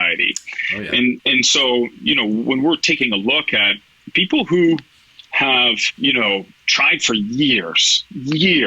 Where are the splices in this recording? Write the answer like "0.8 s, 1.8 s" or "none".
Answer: 1.2 s, 5.9 s